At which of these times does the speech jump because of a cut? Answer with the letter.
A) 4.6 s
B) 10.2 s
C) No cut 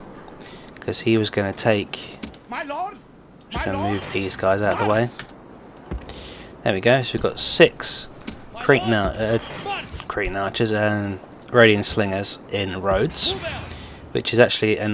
B